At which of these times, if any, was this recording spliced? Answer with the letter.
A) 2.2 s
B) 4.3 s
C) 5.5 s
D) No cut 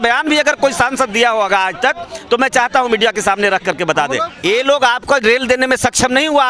B